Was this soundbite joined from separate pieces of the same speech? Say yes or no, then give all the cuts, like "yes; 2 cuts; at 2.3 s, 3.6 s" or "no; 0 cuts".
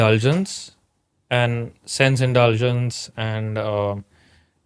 no; 0 cuts